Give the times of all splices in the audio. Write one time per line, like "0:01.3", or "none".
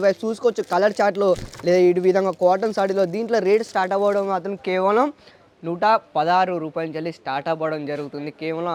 none